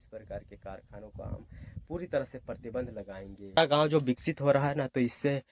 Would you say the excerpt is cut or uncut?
cut